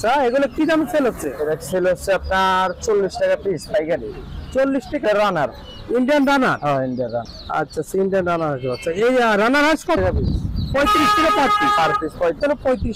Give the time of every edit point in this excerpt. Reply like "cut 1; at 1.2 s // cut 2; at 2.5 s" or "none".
cut 1; at 5.1 s // cut 2; at 10.0 s